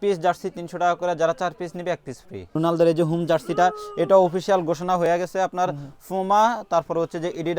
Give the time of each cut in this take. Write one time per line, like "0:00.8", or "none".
0:02.5